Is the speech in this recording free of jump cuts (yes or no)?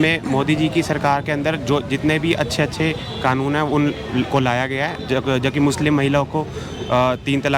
yes